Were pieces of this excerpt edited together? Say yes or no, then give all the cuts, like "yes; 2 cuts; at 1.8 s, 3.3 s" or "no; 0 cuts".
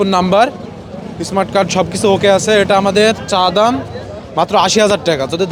no; 0 cuts